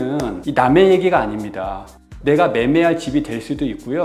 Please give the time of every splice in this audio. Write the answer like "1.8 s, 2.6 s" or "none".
none

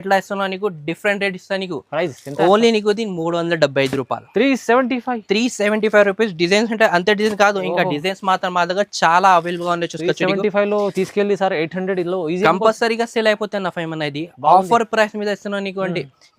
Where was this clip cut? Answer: none

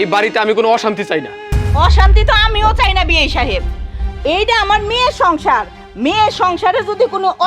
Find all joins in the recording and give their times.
none

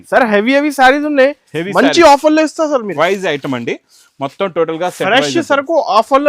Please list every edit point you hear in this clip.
2.9 s

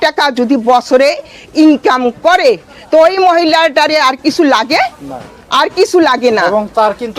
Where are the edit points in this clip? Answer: none

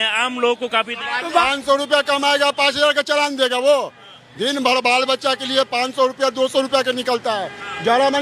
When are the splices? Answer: 1.4 s

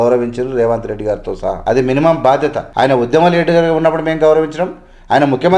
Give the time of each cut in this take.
1.6 s, 2.6 s

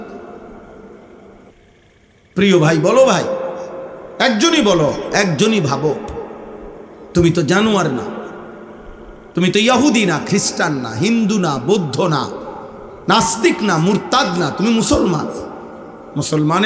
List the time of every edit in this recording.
1.5 s

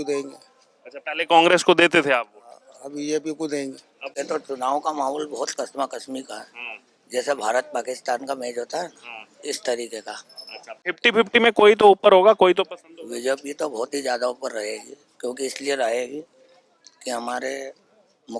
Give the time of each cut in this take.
4.1 s

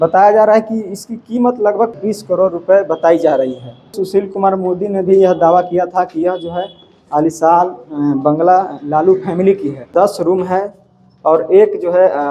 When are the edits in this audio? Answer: 1.9 s, 3.9 s, 9.9 s

